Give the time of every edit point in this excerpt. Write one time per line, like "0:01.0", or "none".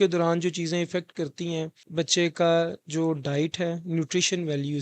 0:01.8